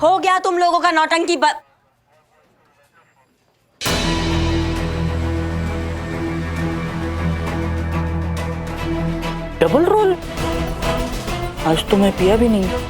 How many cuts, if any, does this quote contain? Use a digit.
2